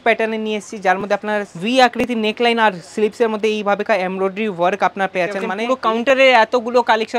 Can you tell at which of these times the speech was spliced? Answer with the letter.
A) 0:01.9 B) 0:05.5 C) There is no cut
B